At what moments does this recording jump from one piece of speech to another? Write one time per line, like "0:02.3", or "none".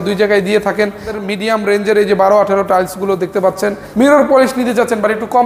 0:01.1
0:03.8